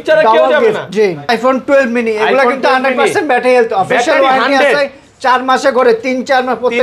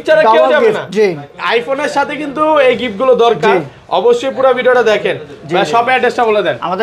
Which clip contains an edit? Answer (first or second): first